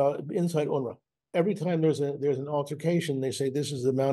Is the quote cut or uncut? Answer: cut